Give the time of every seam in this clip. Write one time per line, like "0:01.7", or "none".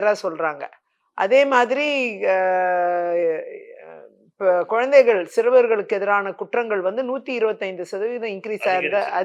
none